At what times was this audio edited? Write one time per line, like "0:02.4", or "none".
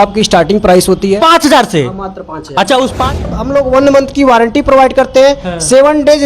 0:03.3